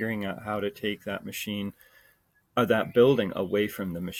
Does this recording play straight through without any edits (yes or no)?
yes